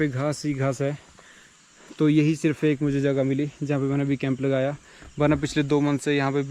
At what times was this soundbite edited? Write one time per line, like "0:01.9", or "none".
none